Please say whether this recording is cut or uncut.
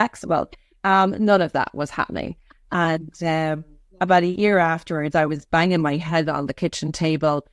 uncut